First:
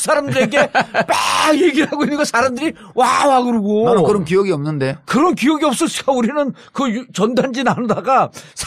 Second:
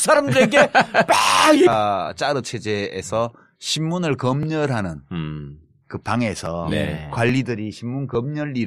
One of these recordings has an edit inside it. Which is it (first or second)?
first